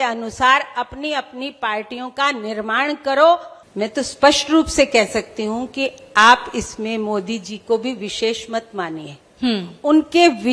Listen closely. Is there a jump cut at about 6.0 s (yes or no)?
no